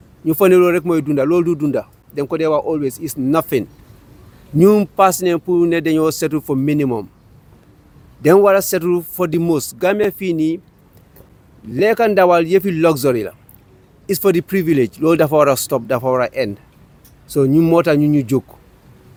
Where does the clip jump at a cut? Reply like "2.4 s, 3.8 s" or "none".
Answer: none